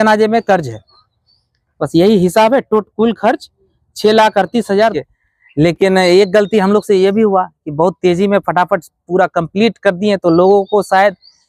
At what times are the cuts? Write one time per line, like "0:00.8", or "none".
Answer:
0:04.9